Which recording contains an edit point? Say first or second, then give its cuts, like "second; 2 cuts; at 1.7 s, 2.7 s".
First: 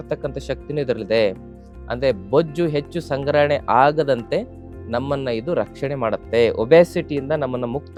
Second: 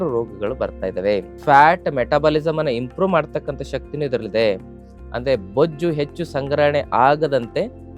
second; 1 cut; at 1.3 s